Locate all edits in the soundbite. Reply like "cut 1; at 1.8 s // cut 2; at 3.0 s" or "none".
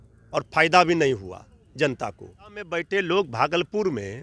cut 1; at 2.8 s